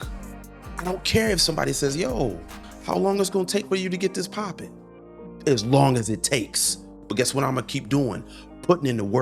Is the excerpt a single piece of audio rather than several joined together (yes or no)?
yes